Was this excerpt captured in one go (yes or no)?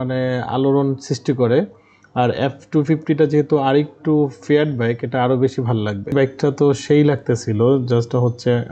no